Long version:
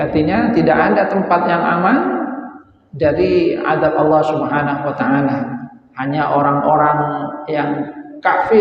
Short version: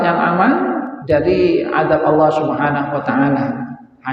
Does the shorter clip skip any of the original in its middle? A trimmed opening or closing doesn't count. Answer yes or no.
yes